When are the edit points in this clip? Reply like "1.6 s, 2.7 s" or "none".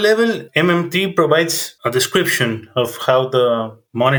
none